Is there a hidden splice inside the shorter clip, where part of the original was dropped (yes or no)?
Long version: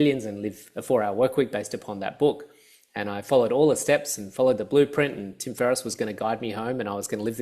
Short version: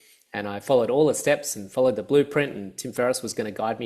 no